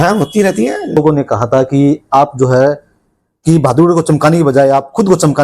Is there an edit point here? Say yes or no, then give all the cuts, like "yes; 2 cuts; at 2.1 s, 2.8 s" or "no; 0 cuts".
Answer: yes; 1 cut; at 1.0 s